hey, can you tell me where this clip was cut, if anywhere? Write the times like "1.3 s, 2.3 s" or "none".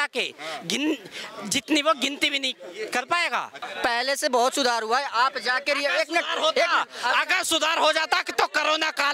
3.6 s